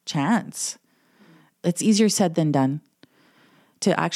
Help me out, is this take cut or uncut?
cut